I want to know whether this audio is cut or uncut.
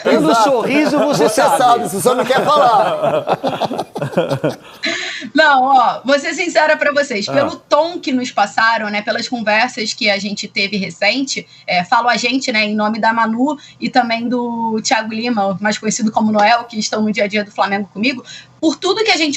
uncut